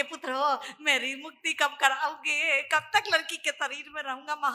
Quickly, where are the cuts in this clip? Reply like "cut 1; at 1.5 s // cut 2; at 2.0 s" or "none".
none